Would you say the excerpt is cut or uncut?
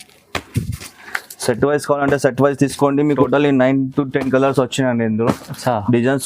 cut